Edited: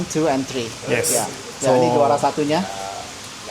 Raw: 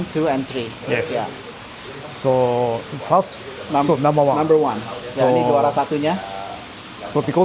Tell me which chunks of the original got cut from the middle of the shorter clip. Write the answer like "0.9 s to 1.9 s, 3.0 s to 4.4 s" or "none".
1.4 s to 5.0 s